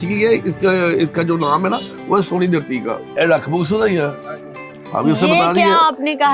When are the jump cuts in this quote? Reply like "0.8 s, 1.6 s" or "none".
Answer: 3.0 s